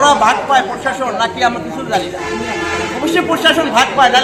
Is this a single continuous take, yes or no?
yes